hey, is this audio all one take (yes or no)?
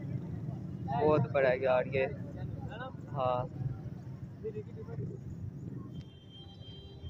yes